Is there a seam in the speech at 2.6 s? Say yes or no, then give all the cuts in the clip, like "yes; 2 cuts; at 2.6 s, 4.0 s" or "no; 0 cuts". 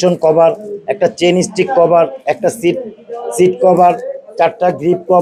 no; 0 cuts